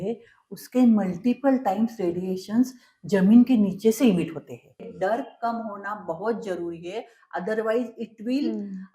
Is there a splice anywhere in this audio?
yes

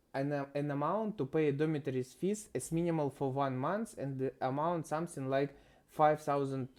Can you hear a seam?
no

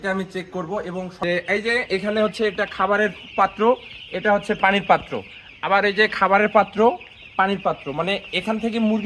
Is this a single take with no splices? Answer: no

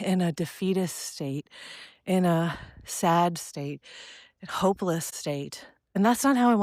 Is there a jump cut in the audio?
yes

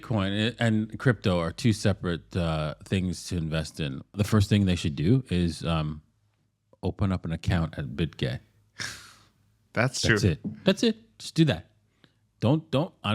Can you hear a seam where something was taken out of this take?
yes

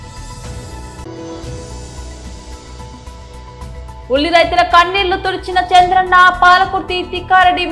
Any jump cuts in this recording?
yes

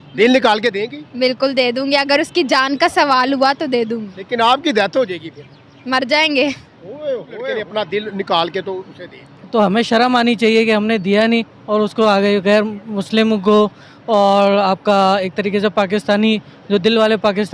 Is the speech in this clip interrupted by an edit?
yes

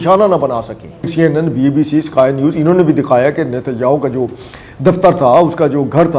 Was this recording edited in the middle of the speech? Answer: yes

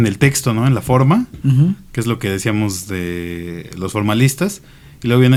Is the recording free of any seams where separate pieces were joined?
yes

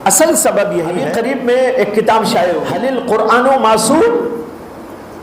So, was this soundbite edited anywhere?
yes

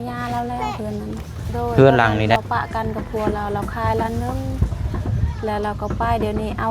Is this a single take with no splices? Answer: no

